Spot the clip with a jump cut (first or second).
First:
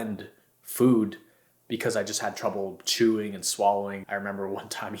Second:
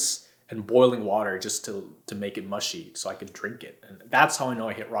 first